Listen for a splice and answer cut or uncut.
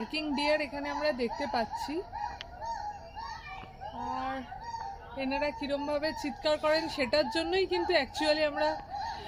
uncut